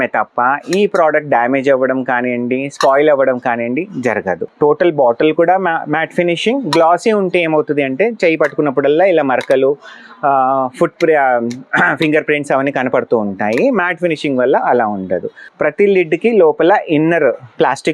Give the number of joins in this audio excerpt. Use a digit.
2